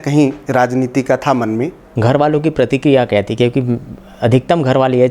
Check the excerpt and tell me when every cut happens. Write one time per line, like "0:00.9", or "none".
0:01.8